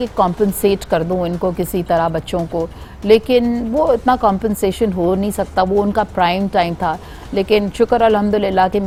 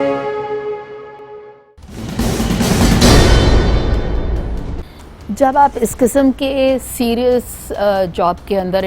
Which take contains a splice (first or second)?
second